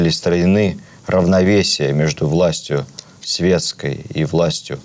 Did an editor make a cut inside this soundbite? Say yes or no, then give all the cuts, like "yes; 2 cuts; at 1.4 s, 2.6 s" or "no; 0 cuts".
no; 0 cuts